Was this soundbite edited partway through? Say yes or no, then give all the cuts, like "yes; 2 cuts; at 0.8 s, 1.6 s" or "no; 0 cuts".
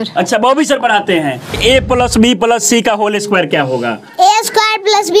yes; 1 cut; at 1.6 s